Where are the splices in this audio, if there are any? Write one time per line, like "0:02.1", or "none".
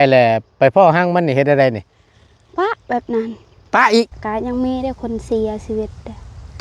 0:04.2